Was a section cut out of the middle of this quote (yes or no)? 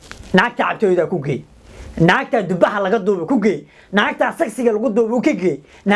no